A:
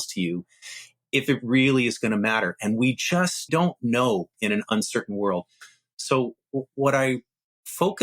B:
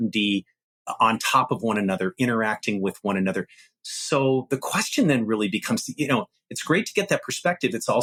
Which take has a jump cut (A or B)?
A